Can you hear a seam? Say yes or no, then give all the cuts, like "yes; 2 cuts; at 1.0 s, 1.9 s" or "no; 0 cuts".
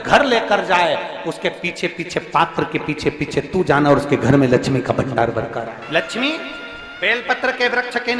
yes; 1 cut; at 5.8 s